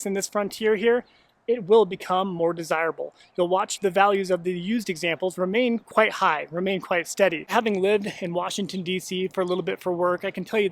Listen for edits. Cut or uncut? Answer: cut